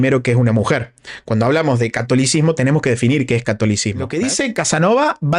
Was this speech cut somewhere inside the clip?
yes; 1 cut; at 4.1 s

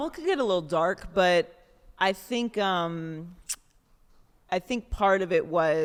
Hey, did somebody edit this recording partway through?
no; 0 cuts

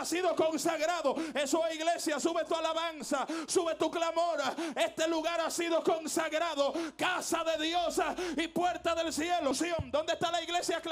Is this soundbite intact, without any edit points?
no; 1 cut; at 9.5 s

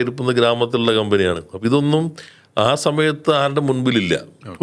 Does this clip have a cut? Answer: no; 0 cuts

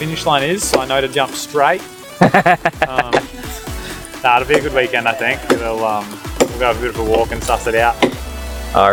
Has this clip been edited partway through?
no; 0 cuts

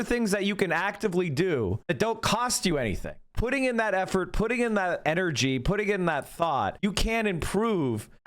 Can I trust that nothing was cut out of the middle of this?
no; 4 cuts; at 1.8 s, 3.2 s, 5.0 s, 6.7 s

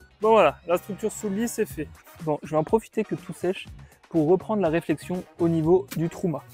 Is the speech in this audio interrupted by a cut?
yes; 1 cut; at 2.0 s

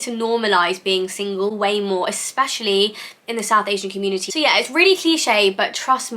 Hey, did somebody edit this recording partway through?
no; 0 cuts

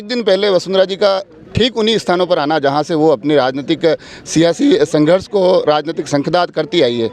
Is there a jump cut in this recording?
no; 0 cuts

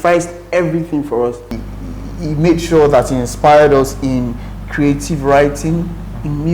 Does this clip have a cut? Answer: yes; 1 cut; at 1.7 s

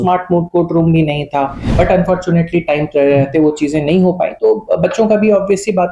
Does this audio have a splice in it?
yes; 1 cut; at 1.6 s

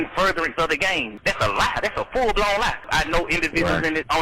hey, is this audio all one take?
no; 2 cuts; at 1.1 s, 2.9 s

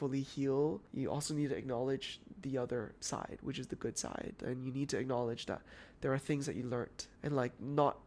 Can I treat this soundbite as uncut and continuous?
no; 3 cuts; at 0.9 s, 3.0 s, 7.0 s

